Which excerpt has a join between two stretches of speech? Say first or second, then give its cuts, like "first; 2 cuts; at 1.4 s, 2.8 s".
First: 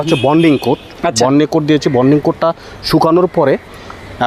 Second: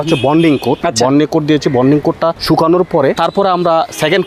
second; 3 cuts; at 0.8 s, 2.4 s, 3.2 s